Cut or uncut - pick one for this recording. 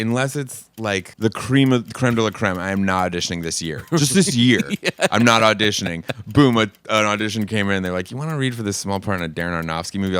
cut